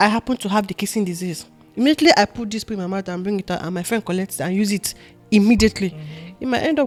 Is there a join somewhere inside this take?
no; 0 cuts

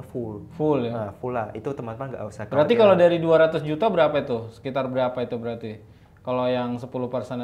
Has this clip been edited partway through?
no; 0 cuts

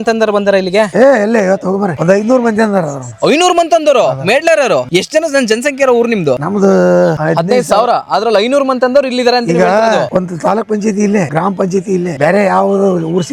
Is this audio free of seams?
yes; 0 cuts

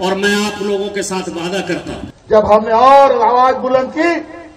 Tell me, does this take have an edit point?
yes; 1 cut; at 2.1 s

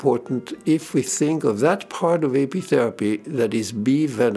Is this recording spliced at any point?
no; 0 cuts

